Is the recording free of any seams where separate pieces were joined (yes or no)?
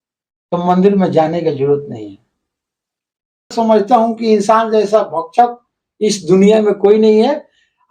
no